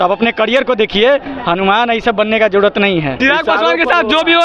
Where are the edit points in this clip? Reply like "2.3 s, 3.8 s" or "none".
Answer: 3.1 s